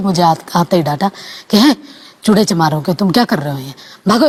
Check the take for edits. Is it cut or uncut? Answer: uncut